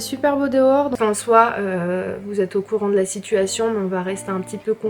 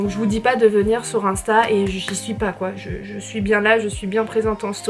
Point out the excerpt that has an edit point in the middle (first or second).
first